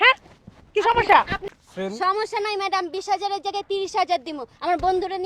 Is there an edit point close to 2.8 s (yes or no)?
no